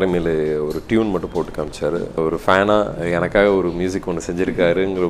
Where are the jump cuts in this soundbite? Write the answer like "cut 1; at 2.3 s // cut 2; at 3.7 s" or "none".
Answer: cut 1; at 2.2 s